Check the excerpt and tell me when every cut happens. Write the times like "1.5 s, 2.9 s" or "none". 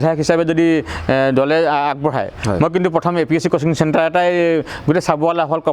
none